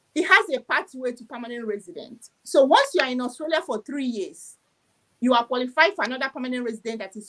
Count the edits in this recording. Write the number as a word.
zero